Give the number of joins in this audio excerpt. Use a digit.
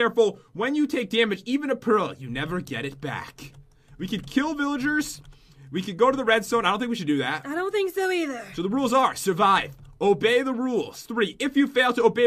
0